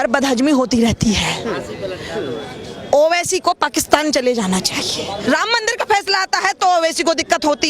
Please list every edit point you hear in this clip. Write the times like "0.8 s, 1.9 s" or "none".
5.2 s